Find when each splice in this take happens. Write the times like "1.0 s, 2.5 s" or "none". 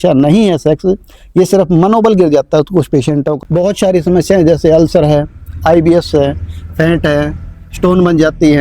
3.3 s